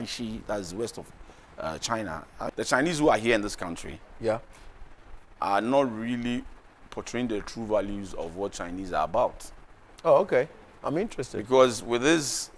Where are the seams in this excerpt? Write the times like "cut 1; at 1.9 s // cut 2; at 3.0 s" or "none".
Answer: cut 1; at 2.5 s